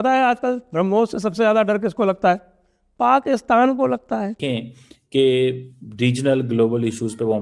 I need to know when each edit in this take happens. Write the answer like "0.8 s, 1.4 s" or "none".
4.4 s